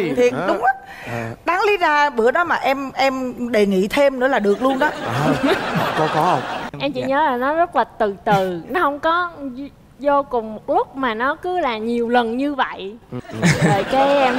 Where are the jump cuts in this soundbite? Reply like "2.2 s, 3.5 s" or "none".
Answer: 6.6 s, 13.2 s